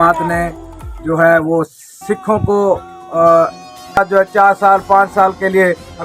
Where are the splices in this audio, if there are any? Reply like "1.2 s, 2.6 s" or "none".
4.0 s